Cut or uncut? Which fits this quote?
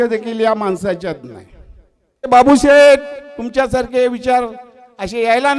cut